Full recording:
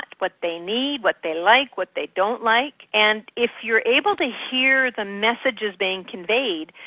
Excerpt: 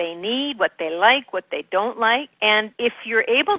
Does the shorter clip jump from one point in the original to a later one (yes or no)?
yes